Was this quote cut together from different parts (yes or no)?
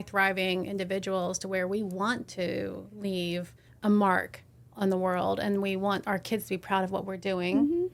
yes